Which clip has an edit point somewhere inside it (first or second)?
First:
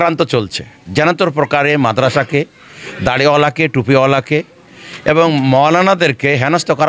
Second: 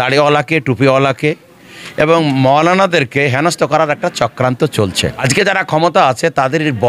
second